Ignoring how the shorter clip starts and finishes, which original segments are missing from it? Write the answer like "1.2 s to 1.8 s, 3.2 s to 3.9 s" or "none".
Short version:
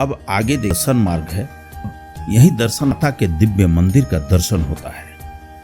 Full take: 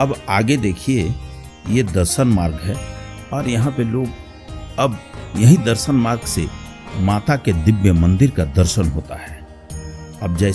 0.8 s to 2.1 s, 3.2 s to 5.0 s, 6.0 s to 7.2 s